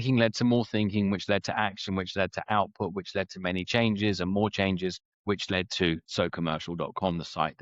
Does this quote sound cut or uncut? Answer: cut